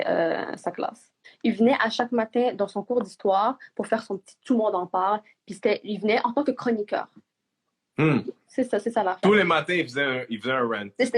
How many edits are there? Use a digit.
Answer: 1